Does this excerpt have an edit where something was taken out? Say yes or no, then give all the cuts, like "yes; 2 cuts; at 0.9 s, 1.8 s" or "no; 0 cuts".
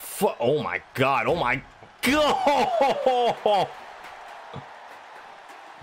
no; 0 cuts